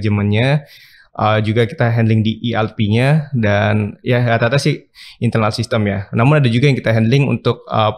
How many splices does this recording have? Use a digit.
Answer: 0